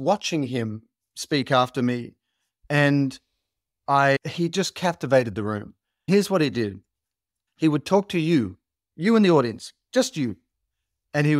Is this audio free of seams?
no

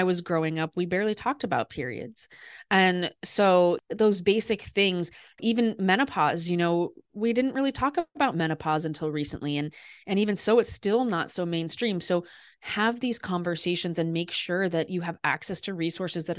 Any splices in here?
yes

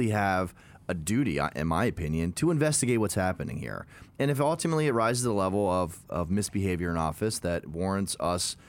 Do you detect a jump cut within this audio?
no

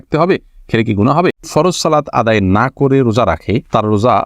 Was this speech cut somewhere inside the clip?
yes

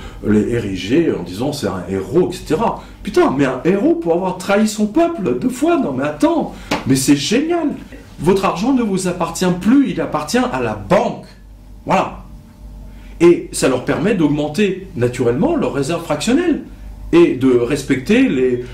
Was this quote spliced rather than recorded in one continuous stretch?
yes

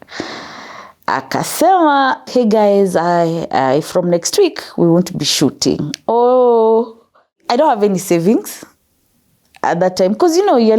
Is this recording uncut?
no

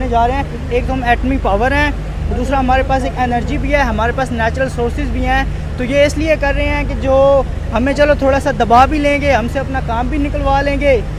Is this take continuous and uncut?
yes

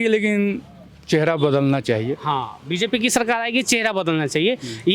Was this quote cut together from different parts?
no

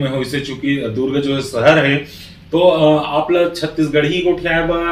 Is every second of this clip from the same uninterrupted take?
yes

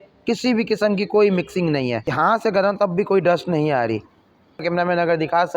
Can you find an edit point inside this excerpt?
yes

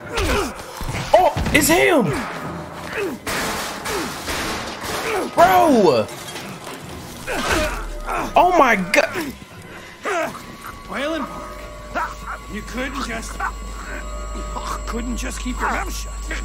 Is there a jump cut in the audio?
no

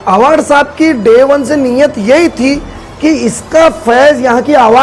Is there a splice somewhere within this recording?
no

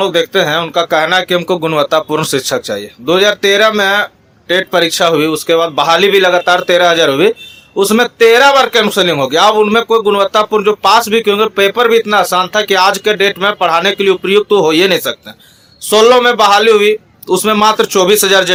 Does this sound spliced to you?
no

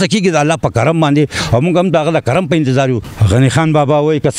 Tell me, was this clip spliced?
yes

